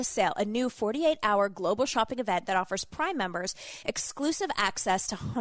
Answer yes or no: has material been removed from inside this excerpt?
no